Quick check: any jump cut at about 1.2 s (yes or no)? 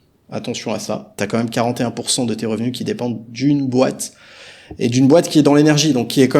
yes